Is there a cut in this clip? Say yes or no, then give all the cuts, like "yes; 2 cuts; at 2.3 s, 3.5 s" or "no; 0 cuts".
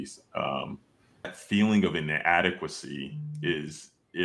yes; 1 cut; at 1.4 s